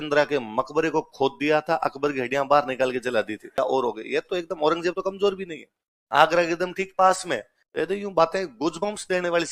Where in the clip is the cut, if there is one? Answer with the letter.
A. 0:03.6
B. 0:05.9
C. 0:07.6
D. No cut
A